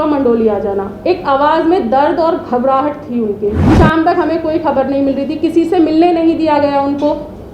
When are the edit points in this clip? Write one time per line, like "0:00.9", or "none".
0:03.7